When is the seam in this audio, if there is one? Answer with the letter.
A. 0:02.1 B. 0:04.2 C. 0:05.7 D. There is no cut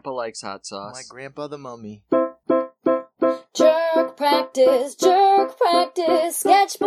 A